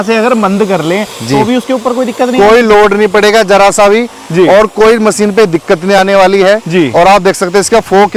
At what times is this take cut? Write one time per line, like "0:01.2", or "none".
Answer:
none

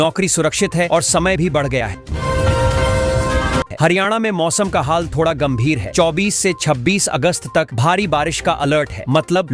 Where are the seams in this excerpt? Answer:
0:02.0
0:03.7

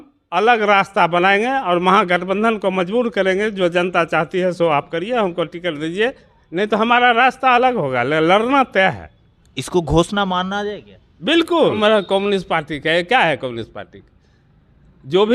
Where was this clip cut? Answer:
0:11.8

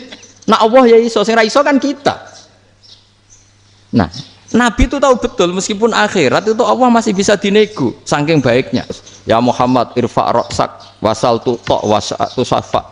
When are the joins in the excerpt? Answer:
0:09.1

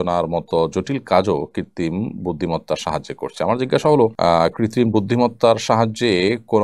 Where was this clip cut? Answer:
0:04.1

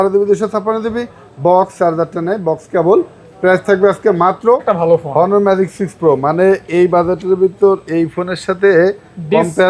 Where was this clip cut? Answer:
0:04.6

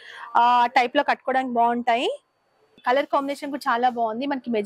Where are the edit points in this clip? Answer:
none

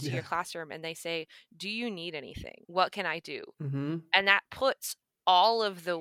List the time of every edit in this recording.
0:03.4

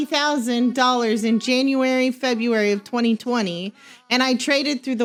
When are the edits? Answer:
none

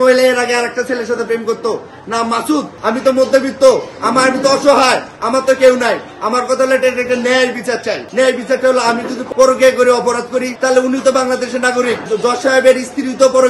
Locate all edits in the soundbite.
0:02.8
0:09.2
0:12.1

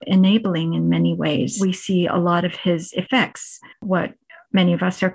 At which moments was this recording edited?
0:01.5

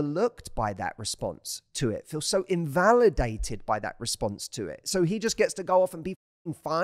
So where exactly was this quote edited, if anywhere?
none

